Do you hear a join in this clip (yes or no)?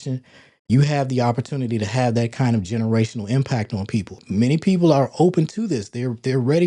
yes